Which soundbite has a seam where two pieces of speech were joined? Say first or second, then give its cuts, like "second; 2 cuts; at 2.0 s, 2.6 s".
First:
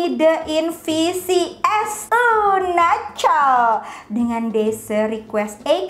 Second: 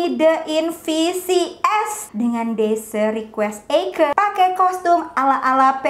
second; 1 cut; at 2.0 s